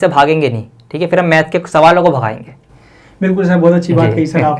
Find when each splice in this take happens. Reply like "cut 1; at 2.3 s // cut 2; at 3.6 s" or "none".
none